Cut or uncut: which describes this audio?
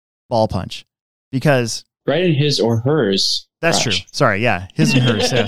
cut